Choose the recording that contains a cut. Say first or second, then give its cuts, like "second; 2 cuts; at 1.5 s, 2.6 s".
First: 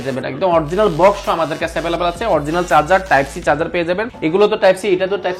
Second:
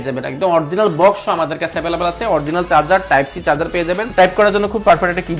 second; 1 cut; at 4.1 s